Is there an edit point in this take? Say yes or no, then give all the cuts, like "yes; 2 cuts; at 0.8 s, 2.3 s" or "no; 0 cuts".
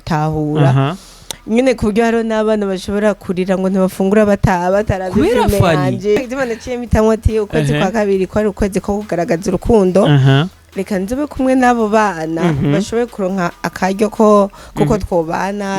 yes; 1 cut; at 6.2 s